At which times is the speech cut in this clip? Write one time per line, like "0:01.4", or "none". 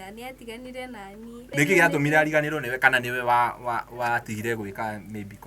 0:01.4